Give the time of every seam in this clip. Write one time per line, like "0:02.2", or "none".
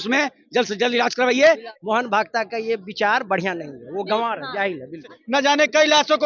0:01.7
0:05.1